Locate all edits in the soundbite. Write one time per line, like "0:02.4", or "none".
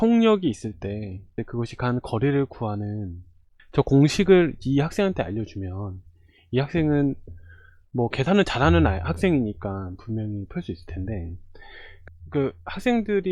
0:01.3